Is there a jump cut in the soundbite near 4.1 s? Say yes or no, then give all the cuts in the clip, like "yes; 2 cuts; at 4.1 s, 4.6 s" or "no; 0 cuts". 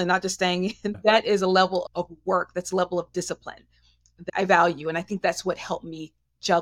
yes; 2 cuts; at 1.0 s, 4.1 s